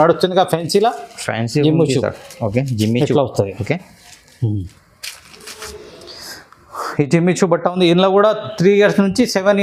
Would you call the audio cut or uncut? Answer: uncut